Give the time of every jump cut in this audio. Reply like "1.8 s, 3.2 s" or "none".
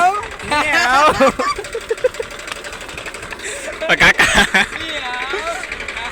none